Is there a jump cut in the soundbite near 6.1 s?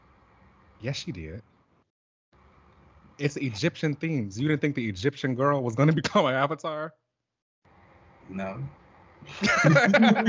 no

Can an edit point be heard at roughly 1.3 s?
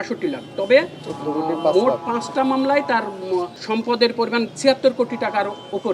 no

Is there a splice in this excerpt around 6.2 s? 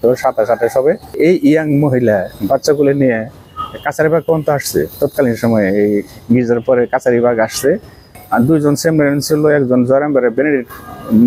no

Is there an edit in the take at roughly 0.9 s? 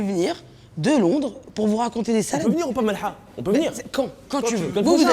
no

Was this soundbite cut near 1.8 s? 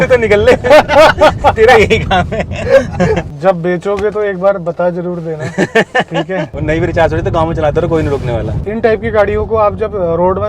no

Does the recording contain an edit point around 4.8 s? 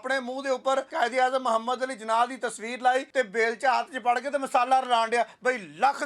no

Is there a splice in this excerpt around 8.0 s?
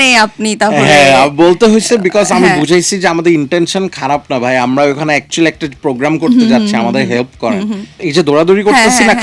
yes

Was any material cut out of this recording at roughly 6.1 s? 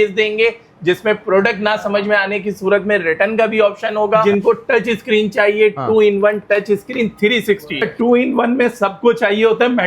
no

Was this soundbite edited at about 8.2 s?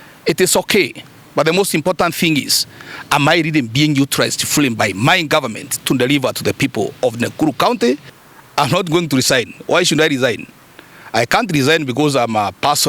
yes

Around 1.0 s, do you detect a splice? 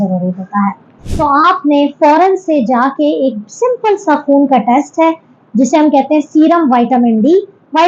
yes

